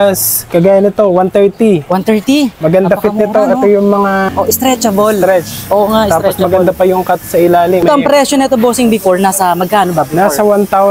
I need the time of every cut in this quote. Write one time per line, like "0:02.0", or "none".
0:02.5
0:04.3
0:07.8